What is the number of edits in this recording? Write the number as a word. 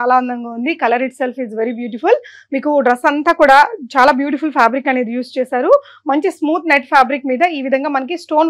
zero